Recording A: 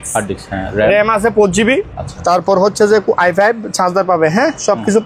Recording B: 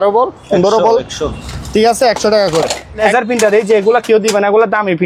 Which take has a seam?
B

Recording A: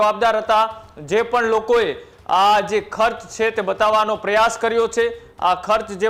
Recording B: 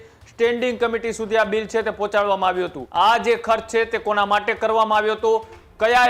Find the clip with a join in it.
B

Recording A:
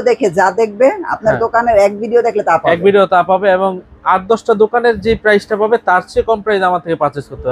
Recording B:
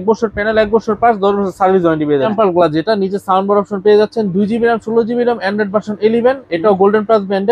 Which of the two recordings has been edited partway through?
B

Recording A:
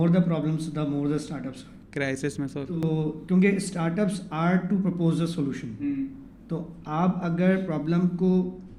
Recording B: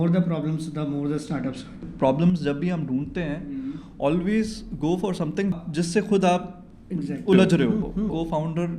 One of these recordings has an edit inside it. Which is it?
B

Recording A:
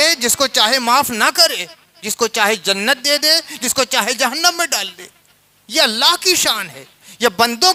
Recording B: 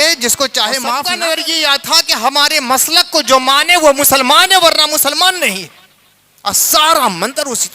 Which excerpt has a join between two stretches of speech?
B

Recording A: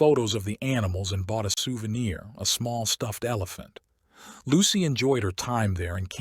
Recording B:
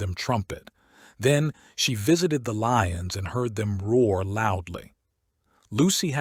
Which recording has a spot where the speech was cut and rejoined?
A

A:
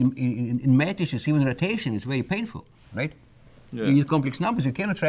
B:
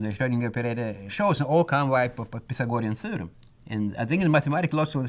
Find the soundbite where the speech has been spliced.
B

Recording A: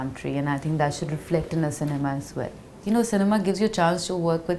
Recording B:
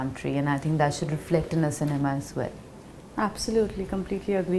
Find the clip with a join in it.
A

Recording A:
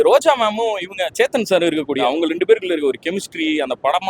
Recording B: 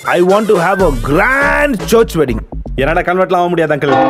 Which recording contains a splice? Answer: A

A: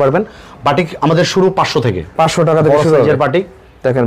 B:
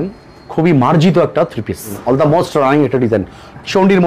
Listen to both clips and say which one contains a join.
B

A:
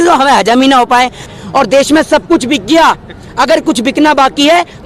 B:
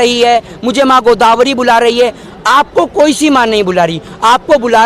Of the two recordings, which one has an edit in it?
A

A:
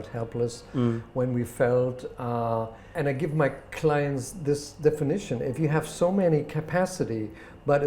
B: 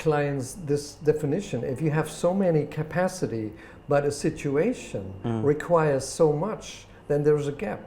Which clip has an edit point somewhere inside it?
A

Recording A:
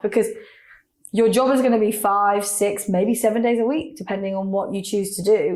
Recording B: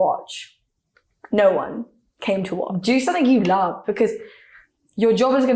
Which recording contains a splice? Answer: B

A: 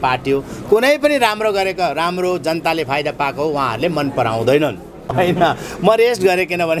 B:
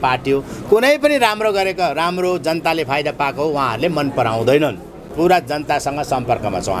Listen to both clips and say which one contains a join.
B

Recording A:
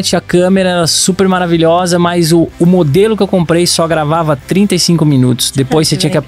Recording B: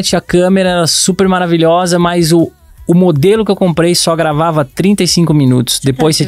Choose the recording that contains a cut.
A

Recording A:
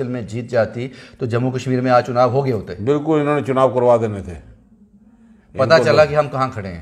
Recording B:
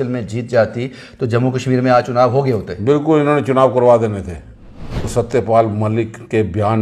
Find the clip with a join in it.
B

